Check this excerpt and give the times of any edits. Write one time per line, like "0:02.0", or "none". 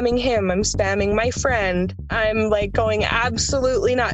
0:02.1